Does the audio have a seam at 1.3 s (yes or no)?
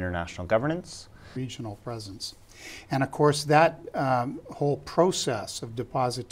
no